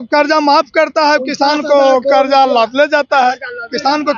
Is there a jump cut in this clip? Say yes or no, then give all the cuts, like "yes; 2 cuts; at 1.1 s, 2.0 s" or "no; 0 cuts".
no; 0 cuts